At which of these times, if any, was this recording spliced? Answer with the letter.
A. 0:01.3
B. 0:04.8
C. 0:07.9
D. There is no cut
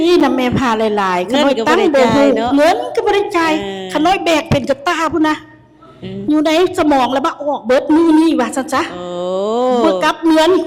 D